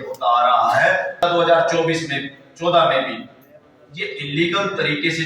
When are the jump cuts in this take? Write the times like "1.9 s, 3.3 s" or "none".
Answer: 1.2 s